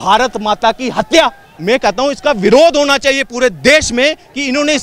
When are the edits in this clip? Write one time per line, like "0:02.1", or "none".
0:01.5